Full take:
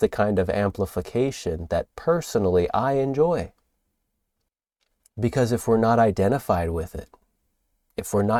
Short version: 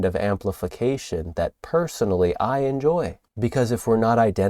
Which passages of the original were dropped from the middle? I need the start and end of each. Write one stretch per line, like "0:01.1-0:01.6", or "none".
0:03.6-0:05.0